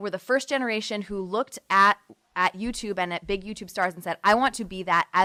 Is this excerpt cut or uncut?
uncut